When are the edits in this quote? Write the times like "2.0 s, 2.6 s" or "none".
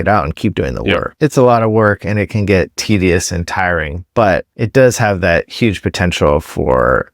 1.1 s, 2.8 s, 4.5 s